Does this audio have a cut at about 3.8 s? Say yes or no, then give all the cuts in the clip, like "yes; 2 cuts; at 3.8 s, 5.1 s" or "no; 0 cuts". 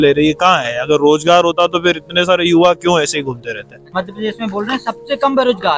yes; 1 cut; at 3.8 s